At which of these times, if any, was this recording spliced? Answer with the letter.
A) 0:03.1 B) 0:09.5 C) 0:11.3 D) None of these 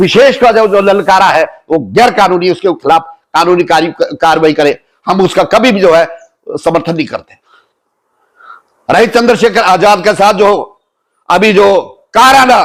D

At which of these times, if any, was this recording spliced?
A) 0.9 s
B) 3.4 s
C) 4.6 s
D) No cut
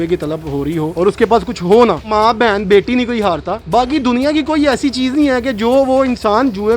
A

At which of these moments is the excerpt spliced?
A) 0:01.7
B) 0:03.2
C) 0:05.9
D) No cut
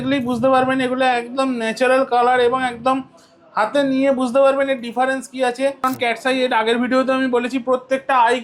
C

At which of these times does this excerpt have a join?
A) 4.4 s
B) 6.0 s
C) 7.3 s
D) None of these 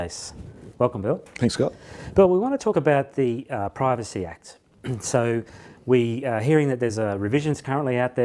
B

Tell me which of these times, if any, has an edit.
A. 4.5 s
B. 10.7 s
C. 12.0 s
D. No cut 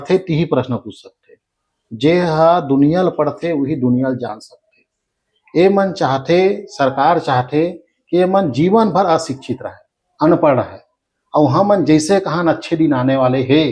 D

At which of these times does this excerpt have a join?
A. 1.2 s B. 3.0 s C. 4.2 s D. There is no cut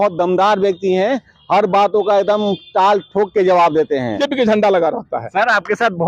C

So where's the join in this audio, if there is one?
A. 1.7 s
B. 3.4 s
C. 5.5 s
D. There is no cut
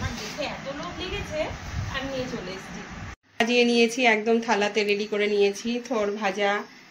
B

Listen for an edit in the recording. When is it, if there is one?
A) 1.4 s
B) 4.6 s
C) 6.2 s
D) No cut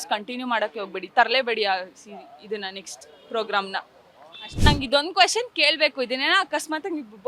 B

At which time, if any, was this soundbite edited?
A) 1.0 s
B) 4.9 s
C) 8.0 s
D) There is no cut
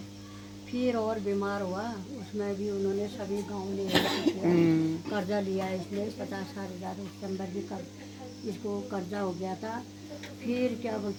D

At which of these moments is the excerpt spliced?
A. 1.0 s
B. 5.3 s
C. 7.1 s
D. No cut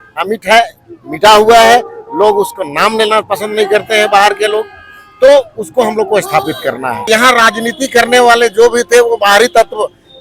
C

